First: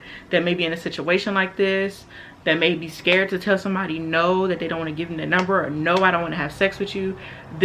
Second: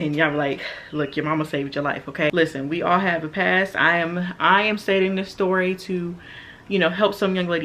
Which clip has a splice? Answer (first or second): second